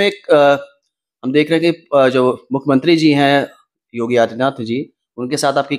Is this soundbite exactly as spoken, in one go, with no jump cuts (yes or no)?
yes